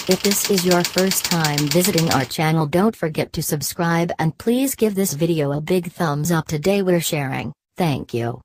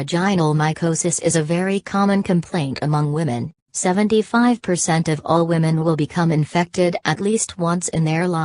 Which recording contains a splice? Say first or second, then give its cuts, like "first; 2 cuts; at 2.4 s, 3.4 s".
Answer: second; 1 cut; at 2.8 s